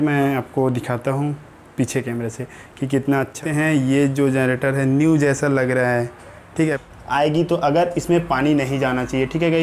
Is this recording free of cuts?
no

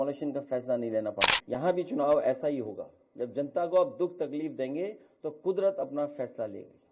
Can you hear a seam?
yes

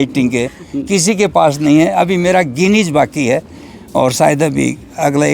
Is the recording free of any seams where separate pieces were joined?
yes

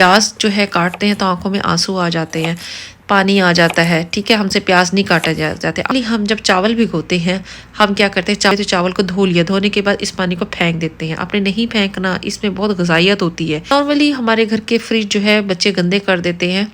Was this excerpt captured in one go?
no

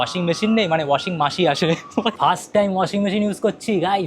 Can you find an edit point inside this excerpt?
yes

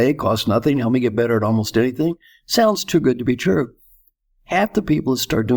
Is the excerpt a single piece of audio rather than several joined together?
yes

